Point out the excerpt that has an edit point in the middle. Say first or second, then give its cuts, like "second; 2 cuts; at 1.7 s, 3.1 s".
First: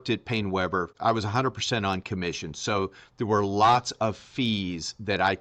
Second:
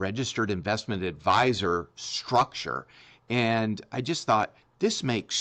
first; 1 cut; at 0.9 s